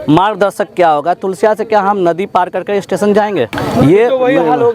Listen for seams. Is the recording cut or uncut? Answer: uncut